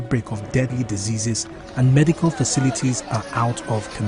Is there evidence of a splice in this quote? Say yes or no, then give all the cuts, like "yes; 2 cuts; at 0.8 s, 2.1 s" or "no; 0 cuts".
yes; 1 cut; at 2.7 s